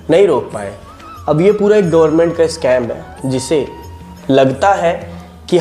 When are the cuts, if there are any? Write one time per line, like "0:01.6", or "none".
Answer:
none

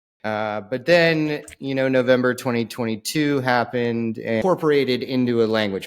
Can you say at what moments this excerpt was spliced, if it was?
0:04.4

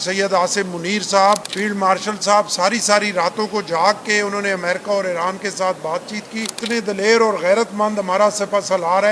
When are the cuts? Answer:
0:01.5
0:06.5

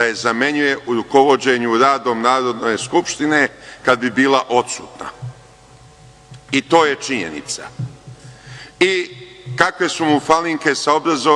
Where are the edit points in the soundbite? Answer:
none

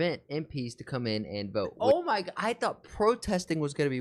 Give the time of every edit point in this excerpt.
0:01.7

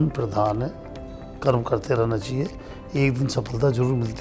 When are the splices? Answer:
none

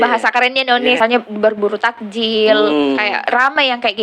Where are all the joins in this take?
0:01.0

